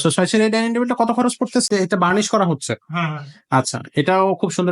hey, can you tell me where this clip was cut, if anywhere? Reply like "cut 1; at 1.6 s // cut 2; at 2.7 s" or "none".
cut 1; at 1.7 s